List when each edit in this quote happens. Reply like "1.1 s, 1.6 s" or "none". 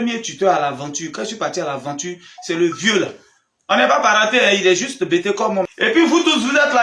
5.7 s